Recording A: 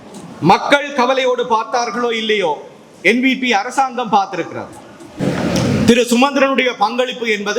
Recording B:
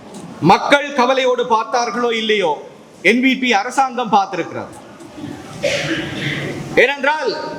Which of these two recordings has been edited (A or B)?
A